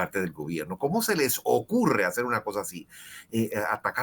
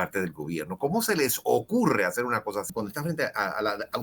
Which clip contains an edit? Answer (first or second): second